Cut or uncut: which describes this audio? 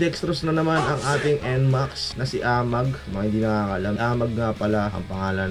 uncut